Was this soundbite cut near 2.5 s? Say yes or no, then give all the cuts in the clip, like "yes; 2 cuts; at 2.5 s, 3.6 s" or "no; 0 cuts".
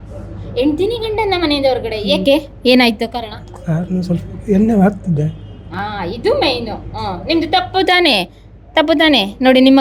no; 0 cuts